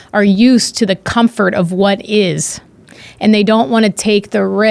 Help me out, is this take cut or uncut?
uncut